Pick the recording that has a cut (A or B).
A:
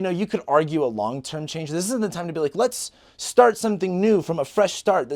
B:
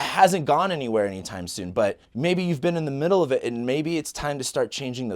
B